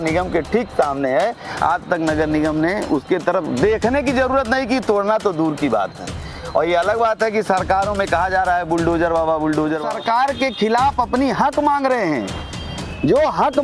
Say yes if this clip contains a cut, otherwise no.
yes